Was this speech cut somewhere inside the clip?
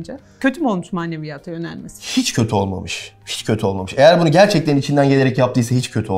no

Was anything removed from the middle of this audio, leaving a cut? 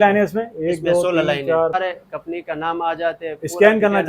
yes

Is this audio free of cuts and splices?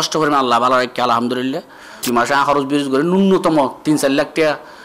no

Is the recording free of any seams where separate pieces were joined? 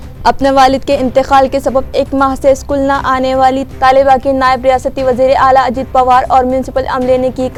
yes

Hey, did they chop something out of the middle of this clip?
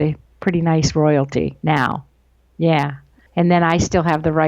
yes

